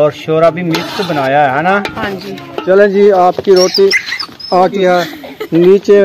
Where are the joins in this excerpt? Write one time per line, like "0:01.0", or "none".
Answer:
0:02.6
0:04.8